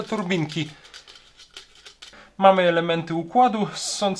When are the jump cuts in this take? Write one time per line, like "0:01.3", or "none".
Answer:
0:02.2